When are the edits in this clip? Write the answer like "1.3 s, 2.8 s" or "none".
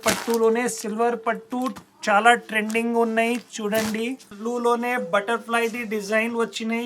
4.4 s